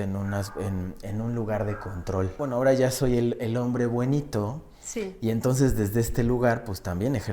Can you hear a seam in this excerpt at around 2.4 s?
yes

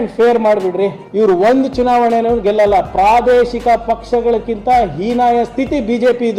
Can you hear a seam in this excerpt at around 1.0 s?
yes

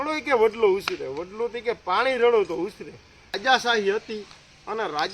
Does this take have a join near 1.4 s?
no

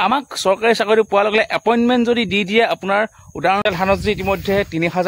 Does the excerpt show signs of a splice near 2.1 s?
no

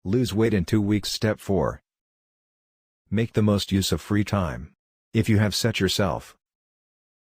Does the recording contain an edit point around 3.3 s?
no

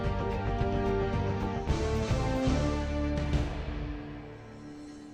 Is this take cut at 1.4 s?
yes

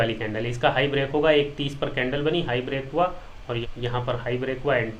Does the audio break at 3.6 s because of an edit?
yes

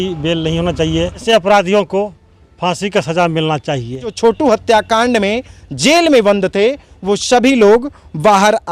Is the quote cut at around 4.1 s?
yes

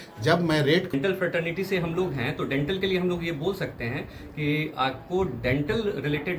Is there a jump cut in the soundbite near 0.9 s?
yes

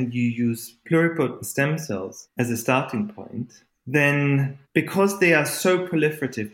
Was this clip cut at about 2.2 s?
yes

